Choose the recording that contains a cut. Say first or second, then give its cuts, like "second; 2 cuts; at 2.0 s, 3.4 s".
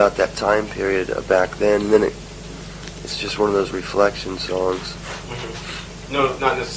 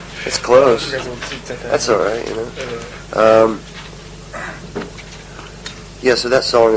first; 1 cut; at 4.2 s